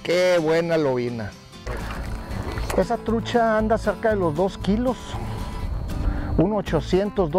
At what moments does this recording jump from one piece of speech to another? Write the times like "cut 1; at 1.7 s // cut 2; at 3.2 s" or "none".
cut 1; at 1.7 s

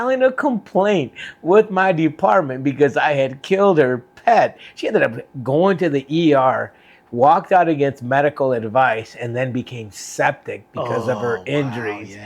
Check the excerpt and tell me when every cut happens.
cut 1; at 4.6 s

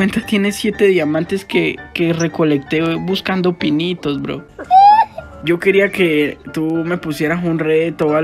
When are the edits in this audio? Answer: none

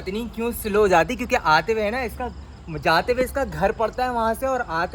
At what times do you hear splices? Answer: none

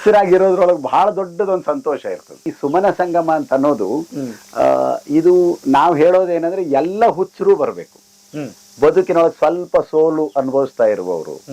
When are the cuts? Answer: cut 1; at 2.4 s

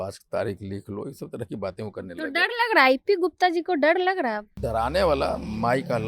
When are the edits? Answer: cut 1; at 4.6 s

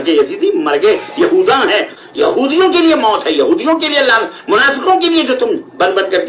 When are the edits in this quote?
cut 1; at 1.9 s

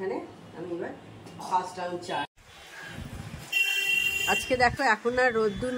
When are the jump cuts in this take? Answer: cut 1; at 2.3 s

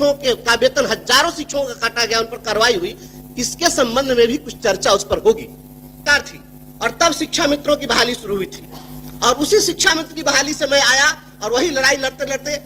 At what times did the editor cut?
cut 1; at 6.0 s

